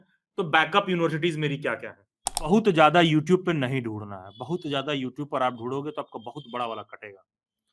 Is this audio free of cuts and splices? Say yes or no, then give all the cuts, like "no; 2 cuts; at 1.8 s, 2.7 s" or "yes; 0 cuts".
no; 1 cut; at 2.5 s